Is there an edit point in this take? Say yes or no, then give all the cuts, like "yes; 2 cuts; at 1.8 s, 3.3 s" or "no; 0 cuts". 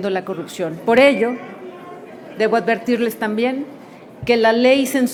no; 0 cuts